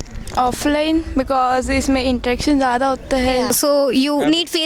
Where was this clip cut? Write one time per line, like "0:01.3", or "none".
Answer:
0:03.6